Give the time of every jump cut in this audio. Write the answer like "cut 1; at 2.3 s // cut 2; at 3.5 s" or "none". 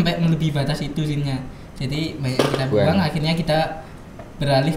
none